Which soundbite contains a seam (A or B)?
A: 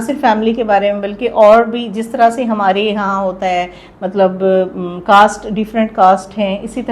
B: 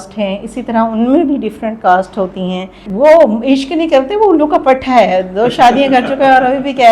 B